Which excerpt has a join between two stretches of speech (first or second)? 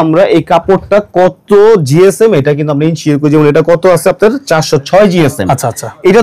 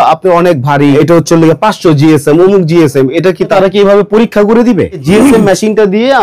second